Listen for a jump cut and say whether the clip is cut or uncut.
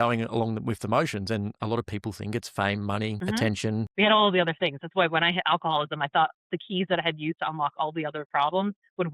cut